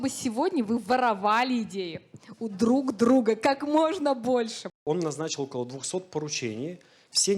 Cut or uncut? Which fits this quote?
cut